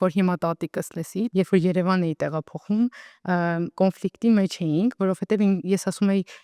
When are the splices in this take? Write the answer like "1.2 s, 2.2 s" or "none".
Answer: 1.3 s